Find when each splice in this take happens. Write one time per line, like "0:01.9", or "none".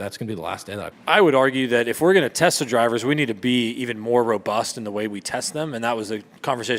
0:01.0